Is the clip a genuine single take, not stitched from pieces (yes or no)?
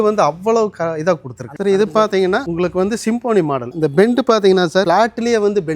no